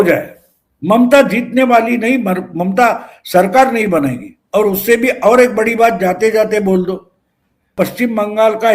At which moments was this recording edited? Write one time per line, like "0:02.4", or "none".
0:07.7